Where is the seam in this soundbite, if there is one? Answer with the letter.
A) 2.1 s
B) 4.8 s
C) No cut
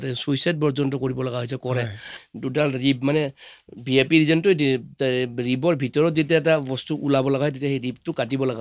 A